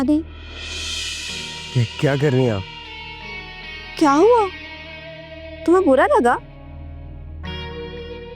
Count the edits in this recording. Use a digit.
0